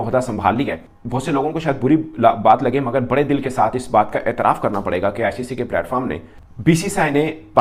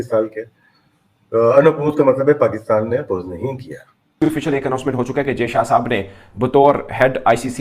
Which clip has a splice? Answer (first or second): second